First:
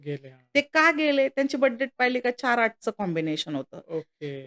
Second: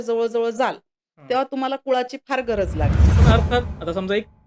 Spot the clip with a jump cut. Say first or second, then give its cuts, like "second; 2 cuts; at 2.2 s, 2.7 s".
second; 1 cut; at 3.2 s